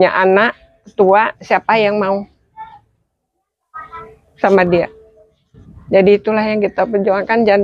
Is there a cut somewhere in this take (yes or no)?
no